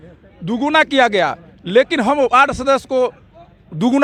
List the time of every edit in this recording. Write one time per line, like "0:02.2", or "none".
none